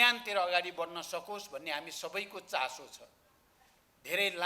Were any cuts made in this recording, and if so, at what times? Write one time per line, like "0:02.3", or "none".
none